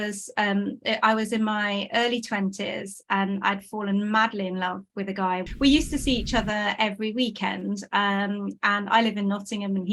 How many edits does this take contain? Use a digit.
1